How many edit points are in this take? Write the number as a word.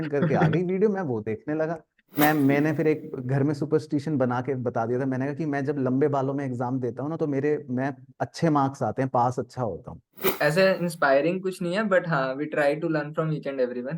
two